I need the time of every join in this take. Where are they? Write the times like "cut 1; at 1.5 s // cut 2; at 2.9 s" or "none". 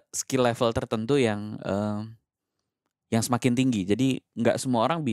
none